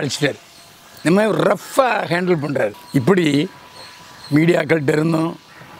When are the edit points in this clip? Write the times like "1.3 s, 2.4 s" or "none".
2.8 s